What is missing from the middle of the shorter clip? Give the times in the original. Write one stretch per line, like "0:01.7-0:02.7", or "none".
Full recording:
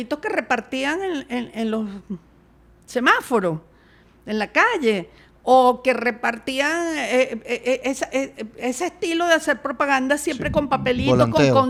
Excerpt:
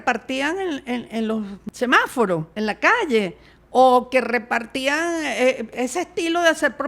0:02.0-0:02.8
0:03.6-0:04.2
0:07.4-0:08.5